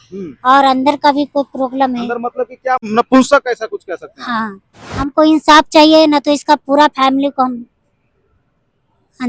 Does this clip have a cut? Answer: yes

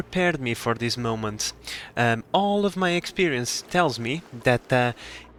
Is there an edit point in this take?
no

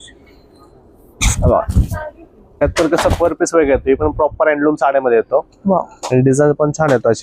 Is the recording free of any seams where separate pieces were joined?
no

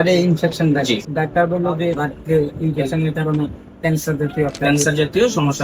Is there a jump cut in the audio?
yes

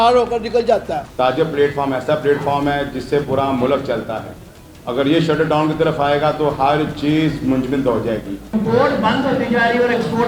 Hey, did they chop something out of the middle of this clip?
yes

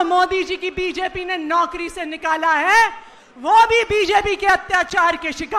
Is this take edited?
no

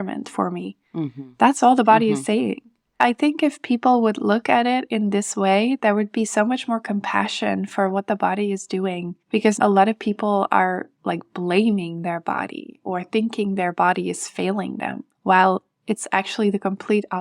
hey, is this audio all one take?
no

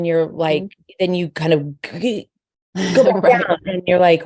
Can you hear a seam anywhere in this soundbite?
no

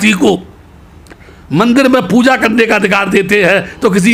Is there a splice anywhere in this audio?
no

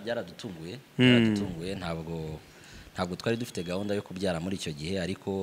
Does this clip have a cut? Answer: no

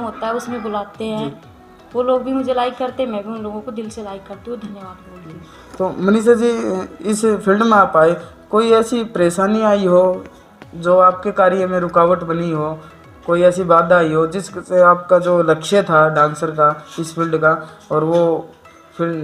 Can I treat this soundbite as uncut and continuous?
yes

